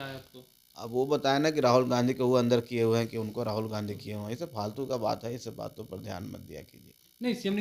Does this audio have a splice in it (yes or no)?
no